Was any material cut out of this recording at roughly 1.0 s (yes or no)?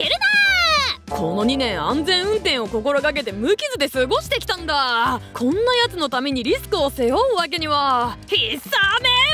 yes